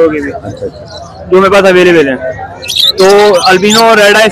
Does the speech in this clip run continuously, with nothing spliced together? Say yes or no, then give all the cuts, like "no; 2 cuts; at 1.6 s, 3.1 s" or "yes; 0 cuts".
yes; 0 cuts